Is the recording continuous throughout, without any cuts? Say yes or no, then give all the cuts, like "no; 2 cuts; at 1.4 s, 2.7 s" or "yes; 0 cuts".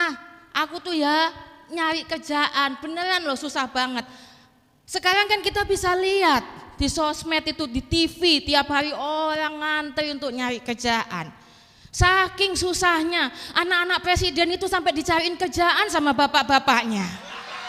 yes; 0 cuts